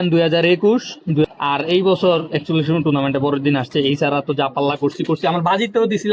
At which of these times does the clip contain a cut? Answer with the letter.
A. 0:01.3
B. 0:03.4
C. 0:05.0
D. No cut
A